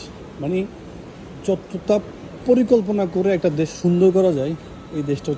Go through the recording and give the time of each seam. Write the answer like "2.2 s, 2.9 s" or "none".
none